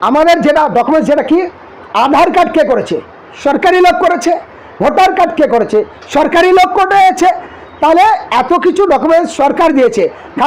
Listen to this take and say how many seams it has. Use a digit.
0